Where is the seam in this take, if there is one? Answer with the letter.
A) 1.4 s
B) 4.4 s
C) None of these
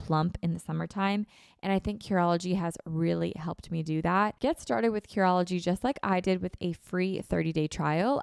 B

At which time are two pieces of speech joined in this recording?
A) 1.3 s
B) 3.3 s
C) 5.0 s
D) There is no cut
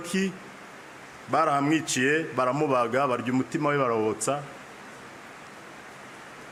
D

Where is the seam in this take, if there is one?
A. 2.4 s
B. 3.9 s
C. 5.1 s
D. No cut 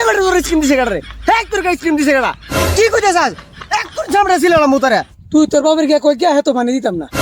C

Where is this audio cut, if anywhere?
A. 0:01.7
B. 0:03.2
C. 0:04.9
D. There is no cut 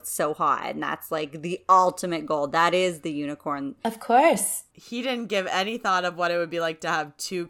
D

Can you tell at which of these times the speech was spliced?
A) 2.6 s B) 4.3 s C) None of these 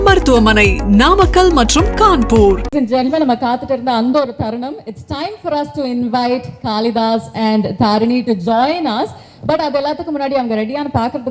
A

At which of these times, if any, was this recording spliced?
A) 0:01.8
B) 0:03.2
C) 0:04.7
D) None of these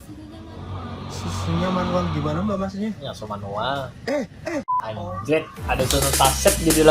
C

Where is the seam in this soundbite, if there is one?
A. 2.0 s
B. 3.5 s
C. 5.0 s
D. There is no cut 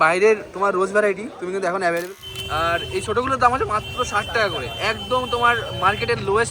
A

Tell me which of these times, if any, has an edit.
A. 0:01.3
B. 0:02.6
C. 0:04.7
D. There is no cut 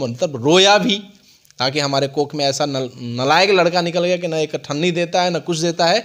D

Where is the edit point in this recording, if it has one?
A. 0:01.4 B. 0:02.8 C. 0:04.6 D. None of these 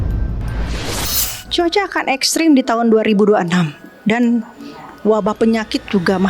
A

